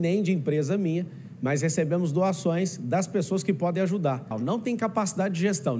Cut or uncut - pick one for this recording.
cut